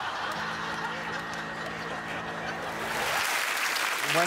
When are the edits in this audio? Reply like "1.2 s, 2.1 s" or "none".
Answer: 3.1 s